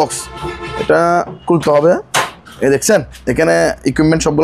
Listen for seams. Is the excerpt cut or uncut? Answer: uncut